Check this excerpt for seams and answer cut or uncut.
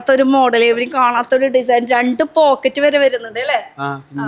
uncut